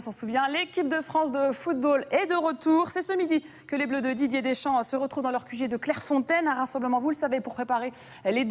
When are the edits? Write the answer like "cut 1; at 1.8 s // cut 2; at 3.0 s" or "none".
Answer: cut 1; at 4.2 s